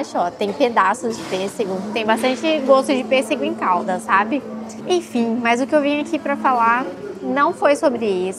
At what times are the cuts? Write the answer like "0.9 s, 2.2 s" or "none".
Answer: none